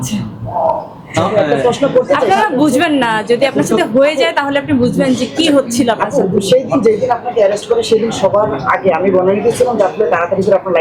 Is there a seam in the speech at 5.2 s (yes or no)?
no